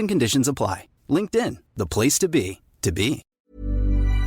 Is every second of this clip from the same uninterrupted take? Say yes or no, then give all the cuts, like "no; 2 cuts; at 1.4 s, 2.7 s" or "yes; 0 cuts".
no; 1 cut; at 3.2 s